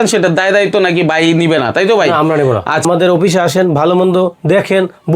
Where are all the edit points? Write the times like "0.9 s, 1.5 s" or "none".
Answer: 2.8 s